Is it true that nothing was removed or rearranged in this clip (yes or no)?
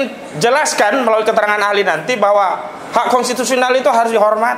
yes